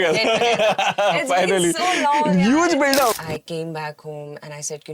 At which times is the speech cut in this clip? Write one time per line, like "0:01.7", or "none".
0:03.2

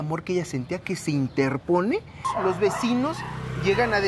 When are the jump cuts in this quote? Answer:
0:02.3

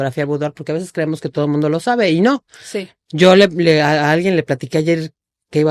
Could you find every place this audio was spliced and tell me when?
none

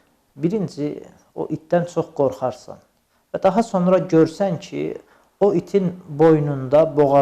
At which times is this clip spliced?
none

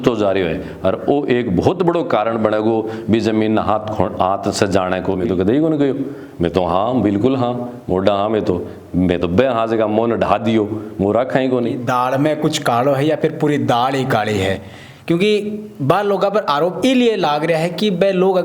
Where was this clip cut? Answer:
0:05.2
0:11.8

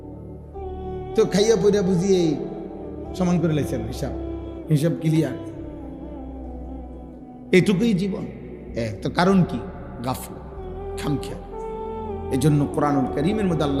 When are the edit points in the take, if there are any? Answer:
0:01.0

